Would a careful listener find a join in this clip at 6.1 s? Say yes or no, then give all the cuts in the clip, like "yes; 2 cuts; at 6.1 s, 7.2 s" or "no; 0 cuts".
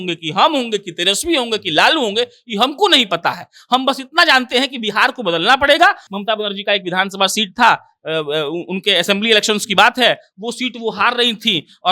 yes; 1 cut; at 6.1 s